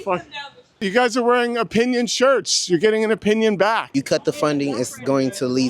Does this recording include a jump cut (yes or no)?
yes